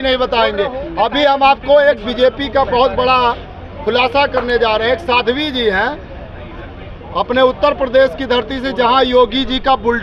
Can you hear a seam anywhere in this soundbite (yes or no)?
no